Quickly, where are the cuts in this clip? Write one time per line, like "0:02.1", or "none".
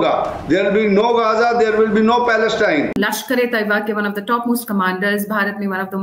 0:03.0